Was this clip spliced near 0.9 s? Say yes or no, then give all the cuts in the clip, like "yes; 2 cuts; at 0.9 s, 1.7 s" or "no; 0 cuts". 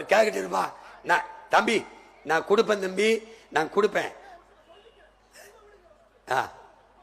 no; 0 cuts